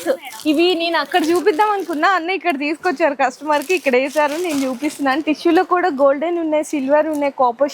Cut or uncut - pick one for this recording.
uncut